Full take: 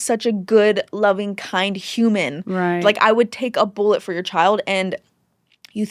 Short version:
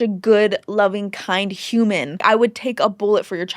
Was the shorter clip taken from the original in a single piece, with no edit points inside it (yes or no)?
no